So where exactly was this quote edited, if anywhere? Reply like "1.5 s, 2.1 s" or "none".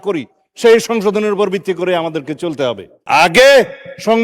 2.9 s